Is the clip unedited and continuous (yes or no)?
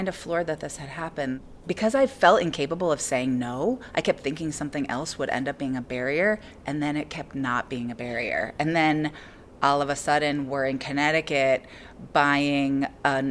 no